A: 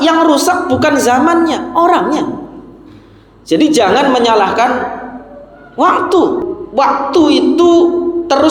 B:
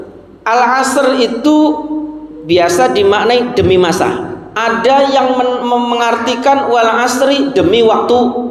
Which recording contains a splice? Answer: A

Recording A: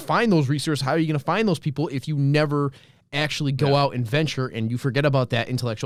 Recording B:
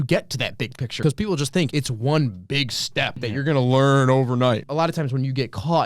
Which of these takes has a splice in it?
B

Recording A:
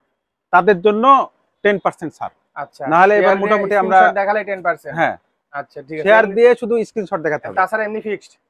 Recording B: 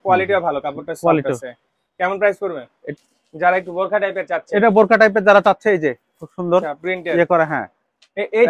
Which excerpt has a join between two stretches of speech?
B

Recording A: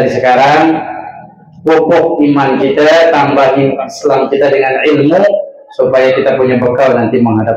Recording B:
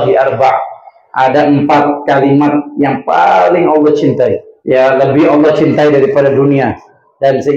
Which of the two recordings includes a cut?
B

